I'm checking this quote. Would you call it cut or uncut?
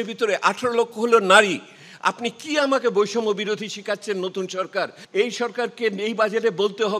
cut